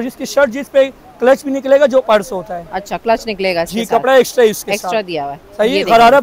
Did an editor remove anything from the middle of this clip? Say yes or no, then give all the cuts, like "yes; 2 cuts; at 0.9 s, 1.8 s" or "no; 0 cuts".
no; 0 cuts